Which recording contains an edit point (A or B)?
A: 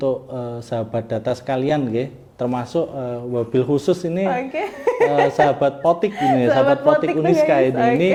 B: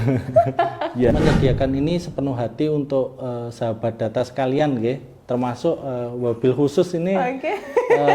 B